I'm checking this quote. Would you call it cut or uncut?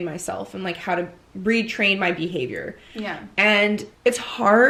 uncut